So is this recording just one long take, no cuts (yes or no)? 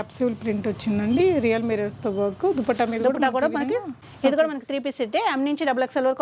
yes